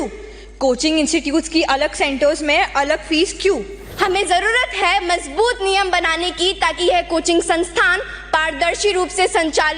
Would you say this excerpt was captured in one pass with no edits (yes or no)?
no